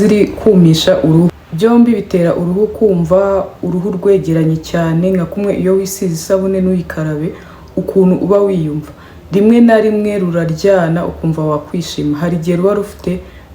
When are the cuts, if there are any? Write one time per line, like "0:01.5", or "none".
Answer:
0:01.4